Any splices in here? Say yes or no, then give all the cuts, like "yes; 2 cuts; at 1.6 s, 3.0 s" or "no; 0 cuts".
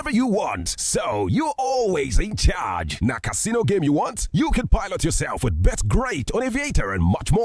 no; 0 cuts